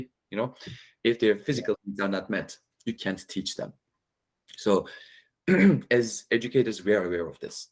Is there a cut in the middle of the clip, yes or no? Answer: no